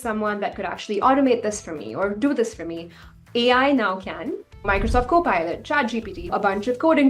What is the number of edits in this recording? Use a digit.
2